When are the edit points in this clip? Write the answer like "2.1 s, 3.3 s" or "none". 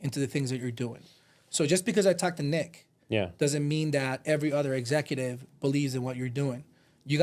none